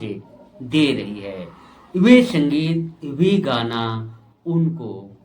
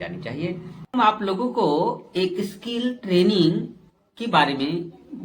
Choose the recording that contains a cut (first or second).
second